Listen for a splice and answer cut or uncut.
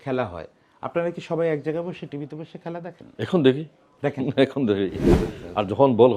cut